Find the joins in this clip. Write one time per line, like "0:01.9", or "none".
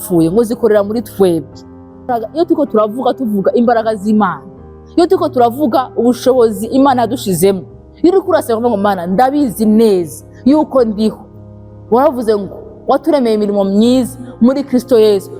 0:02.1